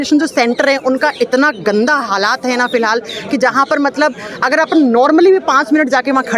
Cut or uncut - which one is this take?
uncut